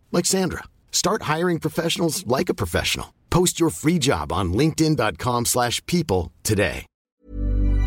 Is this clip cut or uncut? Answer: cut